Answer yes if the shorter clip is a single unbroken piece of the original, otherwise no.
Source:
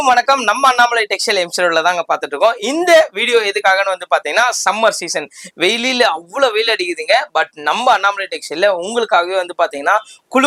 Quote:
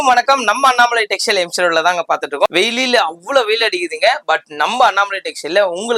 no